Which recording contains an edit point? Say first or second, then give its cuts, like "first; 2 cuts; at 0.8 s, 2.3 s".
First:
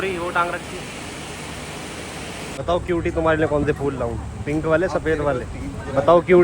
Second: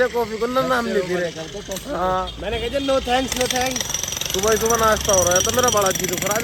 first; 1 cut; at 2.5 s